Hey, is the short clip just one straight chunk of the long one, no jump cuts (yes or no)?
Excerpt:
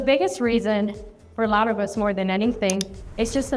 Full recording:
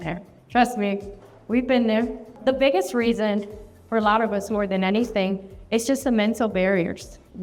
yes